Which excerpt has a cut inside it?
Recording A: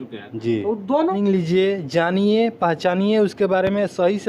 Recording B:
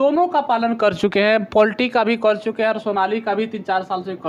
A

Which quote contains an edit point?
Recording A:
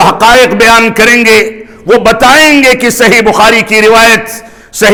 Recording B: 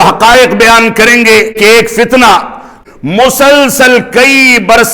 B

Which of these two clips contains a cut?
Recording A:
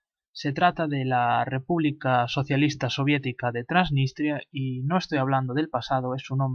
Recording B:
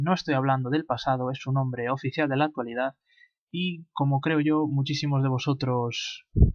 B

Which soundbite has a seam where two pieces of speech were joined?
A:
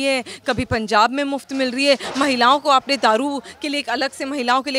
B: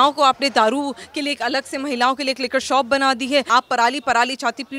B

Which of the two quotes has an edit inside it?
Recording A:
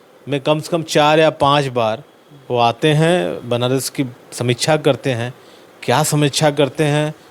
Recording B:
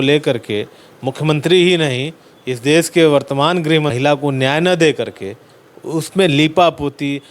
B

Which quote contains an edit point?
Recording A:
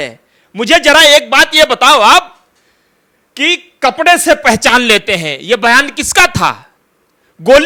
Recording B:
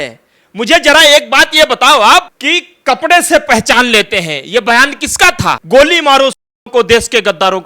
B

